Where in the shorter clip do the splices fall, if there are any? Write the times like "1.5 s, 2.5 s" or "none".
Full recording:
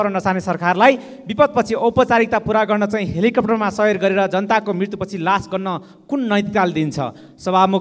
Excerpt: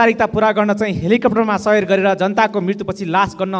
none